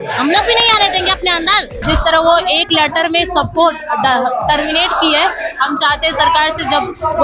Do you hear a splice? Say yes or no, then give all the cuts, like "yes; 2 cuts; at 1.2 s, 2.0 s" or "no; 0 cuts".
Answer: yes; 1 cut; at 1.8 s